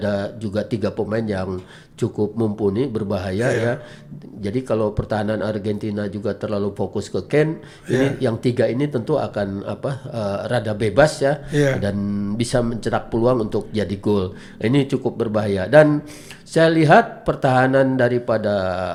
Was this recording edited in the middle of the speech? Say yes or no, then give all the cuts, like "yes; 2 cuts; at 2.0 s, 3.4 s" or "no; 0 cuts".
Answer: no; 0 cuts